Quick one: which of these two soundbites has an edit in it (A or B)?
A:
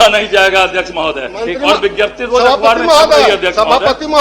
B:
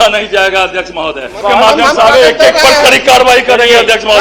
B